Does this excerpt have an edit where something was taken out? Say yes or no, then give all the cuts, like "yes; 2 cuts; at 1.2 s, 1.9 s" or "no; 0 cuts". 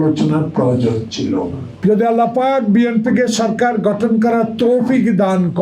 yes; 1 cut; at 1.9 s